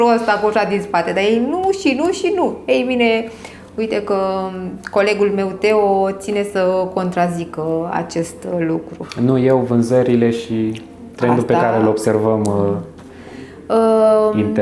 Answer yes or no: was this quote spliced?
no